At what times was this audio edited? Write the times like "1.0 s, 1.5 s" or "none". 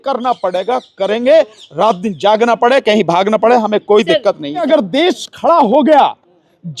4.6 s